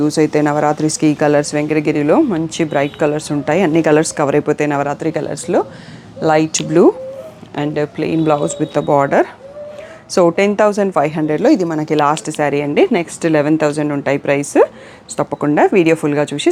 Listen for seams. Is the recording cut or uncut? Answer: uncut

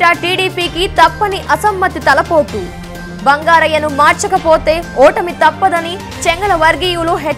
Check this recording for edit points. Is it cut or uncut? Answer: uncut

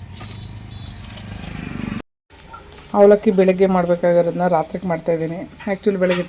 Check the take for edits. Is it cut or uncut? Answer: uncut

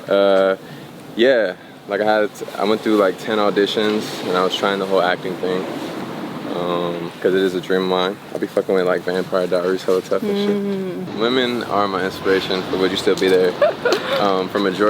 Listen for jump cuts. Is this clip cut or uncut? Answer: cut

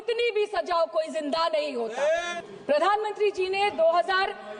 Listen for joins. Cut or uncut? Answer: uncut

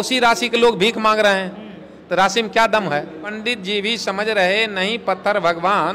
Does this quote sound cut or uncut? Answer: cut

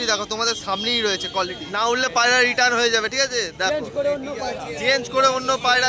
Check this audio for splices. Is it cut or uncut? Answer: cut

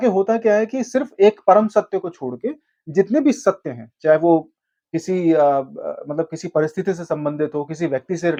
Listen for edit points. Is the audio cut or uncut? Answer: uncut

